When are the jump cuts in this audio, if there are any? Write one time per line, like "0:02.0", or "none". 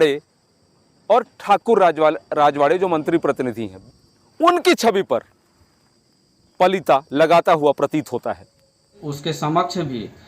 0:03.7
0:09.1